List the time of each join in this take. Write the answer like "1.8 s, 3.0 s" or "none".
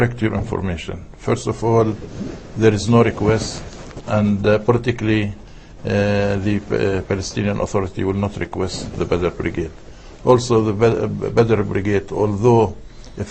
10.7 s